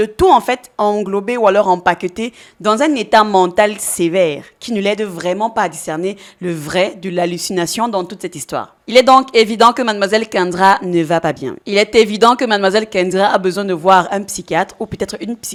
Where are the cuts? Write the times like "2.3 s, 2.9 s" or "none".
none